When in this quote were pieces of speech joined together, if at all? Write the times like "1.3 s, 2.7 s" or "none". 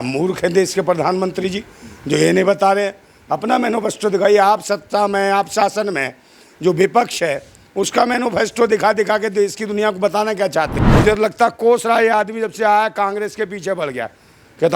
10.8 s

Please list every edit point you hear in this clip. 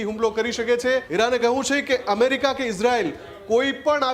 1.1 s

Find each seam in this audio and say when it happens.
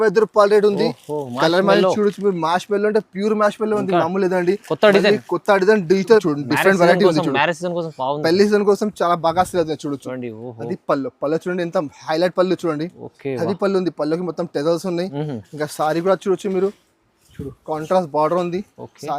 6.2 s

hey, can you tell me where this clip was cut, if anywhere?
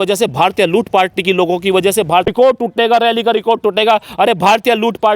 2.2 s

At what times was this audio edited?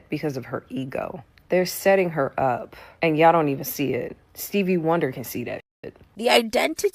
1.3 s, 6.1 s

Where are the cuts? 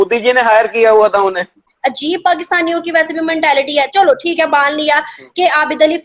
1.7 s

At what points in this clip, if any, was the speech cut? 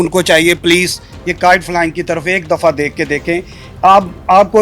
none

